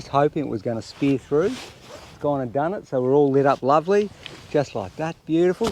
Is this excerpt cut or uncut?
uncut